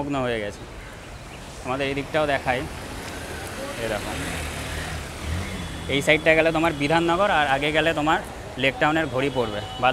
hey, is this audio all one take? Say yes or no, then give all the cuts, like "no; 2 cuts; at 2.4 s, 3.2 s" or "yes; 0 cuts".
yes; 0 cuts